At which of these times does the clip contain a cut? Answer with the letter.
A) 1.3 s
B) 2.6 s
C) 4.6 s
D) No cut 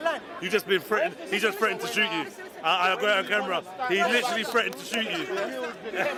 D